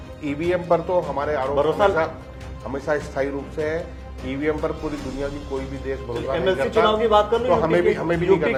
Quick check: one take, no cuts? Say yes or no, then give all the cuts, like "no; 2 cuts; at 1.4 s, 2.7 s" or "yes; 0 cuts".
yes; 0 cuts